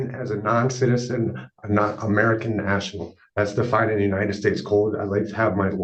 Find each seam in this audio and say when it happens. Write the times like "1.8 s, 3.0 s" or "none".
none